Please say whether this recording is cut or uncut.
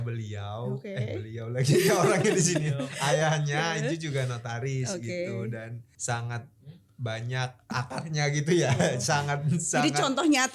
cut